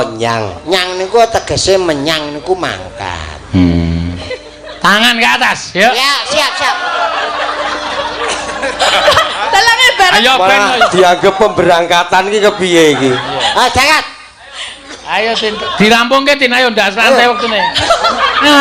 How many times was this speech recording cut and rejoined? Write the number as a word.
one